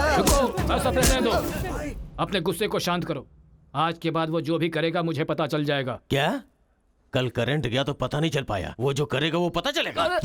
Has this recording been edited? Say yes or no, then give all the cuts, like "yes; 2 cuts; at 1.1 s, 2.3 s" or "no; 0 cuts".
no; 0 cuts